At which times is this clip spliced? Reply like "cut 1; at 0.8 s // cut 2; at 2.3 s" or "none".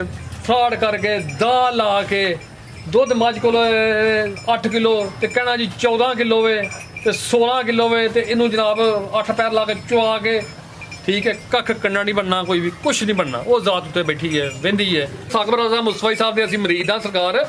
cut 1; at 15.3 s